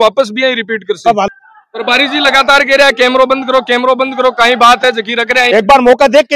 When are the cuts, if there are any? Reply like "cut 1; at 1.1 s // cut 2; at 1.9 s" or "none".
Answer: cut 1; at 1.3 s // cut 2; at 5.4 s